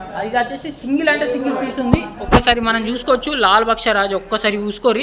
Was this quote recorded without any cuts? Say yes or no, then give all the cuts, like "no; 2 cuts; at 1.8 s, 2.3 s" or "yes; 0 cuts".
yes; 0 cuts